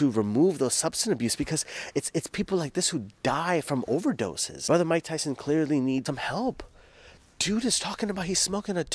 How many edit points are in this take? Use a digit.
2